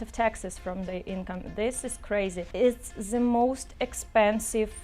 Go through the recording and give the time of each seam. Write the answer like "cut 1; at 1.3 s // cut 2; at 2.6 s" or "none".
cut 1; at 2.4 s